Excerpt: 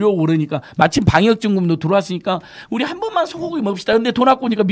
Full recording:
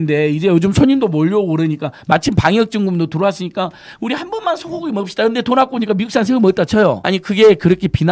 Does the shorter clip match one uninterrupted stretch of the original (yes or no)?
yes